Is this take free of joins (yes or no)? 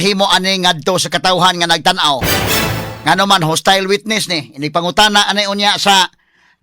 yes